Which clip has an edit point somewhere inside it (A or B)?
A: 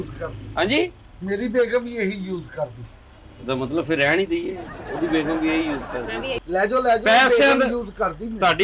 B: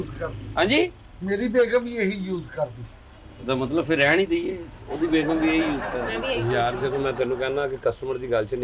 A